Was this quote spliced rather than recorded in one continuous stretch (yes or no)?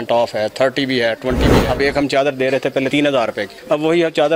yes